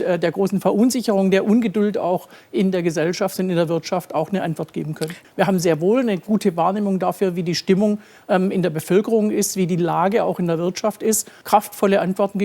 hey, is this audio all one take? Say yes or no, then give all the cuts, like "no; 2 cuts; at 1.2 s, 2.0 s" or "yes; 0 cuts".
no; 2 cuts; at 5.1 s, 11.3 s